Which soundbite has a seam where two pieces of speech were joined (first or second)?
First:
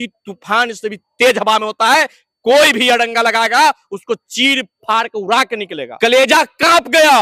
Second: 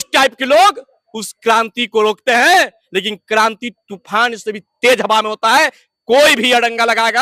first